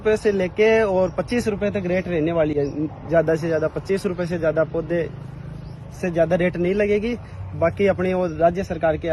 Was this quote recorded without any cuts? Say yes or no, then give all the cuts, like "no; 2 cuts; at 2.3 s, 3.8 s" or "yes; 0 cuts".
yes; 0 cuts